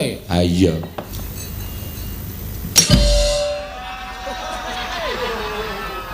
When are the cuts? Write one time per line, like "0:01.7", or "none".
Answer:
0:01.1

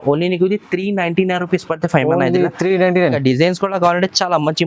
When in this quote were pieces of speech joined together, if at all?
0:03.2

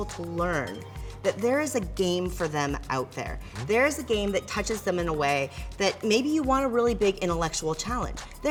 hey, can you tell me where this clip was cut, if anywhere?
none

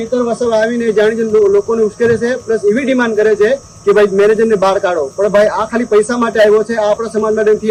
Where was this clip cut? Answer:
none

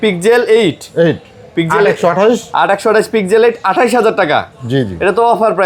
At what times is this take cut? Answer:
none

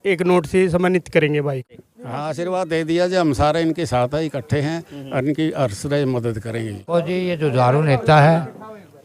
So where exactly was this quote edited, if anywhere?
0:01.8
0:06.9

